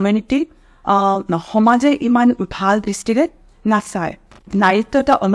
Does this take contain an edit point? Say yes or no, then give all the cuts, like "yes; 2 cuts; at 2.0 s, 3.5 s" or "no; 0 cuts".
yes; 1 cut; at 4.4 s